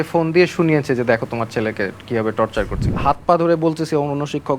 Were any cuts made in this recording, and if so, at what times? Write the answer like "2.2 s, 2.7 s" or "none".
2.9 s

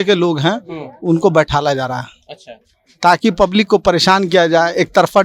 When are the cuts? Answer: none

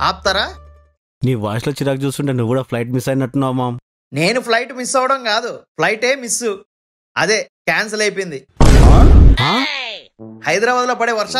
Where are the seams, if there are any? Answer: none

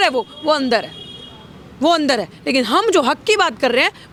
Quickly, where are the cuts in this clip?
none

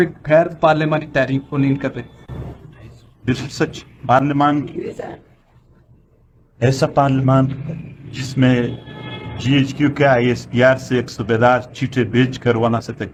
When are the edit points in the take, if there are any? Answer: none

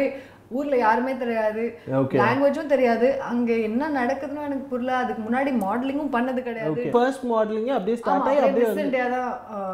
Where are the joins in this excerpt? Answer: 6.9 s

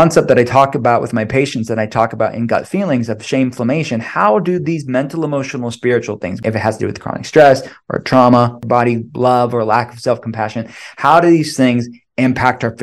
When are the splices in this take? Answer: 6.3 s, 8.6 s

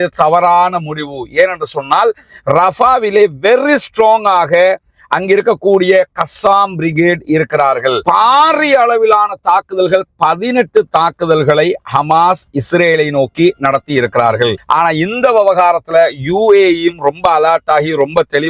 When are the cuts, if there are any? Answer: 8.0 s, 14.6 s

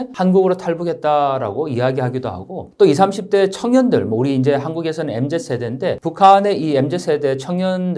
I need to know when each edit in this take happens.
none

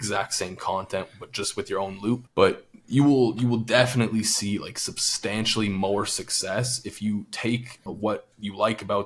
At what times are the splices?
7.9 s

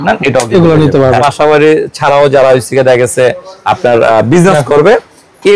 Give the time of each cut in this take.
1.2 s

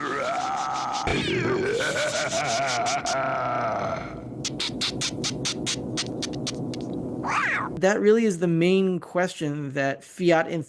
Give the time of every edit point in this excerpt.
1.1 s, 7.7 s

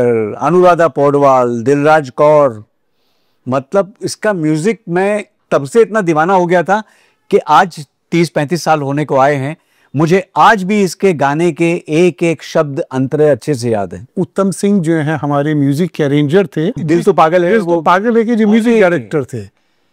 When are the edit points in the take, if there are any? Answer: 14.1 s, 16.8 s

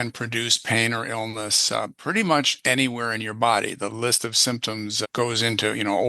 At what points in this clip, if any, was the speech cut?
5.0 s

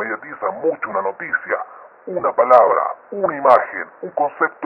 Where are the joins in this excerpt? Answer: 3.4 s

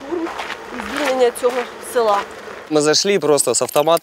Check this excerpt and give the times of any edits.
2.7 s

